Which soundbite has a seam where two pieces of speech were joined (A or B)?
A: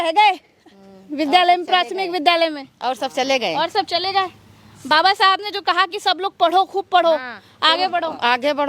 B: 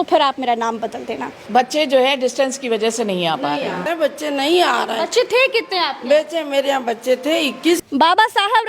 B